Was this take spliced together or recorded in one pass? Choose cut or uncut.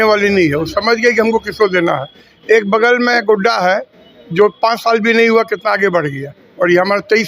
uncut